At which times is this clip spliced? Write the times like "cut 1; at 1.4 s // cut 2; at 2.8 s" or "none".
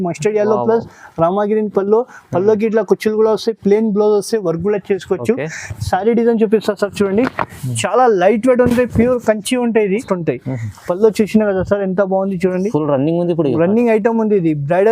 cut 1; at 10.0 s